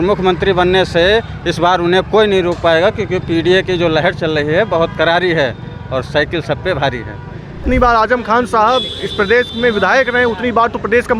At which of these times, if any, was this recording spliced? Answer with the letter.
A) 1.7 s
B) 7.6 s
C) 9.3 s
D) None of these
B